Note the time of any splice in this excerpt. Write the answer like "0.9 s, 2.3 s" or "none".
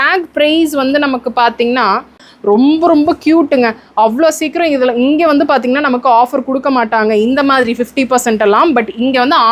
2.3 s